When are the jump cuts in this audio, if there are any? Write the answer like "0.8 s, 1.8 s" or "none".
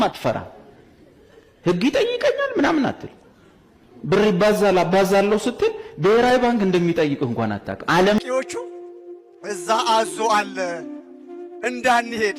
8.2 s